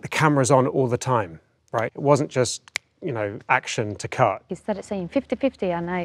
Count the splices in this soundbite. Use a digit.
2